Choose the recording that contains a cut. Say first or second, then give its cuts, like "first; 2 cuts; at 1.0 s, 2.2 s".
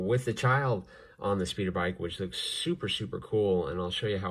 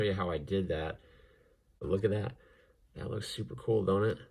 second; 1 cut; at 1.8 s